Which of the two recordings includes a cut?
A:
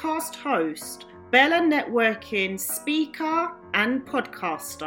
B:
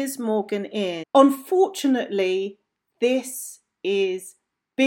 B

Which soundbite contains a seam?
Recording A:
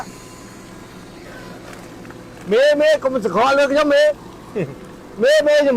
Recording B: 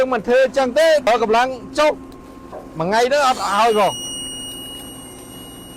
B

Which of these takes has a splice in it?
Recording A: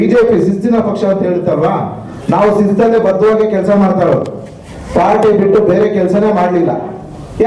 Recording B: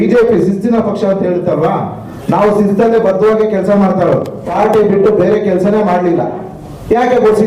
B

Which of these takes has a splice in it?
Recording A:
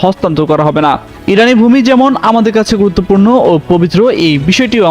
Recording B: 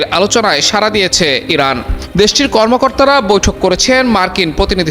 A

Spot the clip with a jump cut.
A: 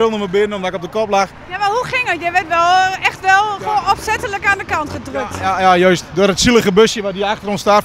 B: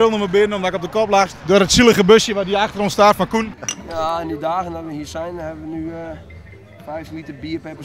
B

